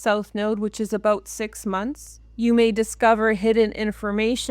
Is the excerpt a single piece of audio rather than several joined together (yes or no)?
no